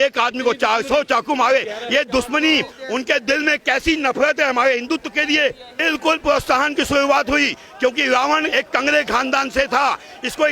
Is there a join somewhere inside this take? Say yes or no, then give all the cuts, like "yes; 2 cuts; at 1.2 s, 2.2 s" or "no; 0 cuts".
yes; 1 cut; at 5.7 s